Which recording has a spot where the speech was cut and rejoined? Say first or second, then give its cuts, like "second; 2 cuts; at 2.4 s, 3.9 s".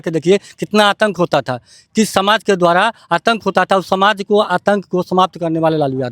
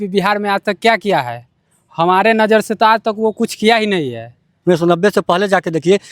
second; 1 cut; at 4.5 s